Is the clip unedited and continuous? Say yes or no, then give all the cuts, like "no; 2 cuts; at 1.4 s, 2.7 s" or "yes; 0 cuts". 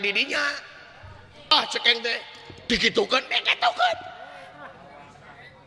no; 1 cut; at 1.5 s